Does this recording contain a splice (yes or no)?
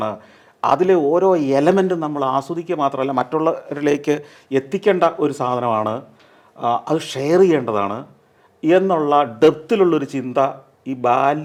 no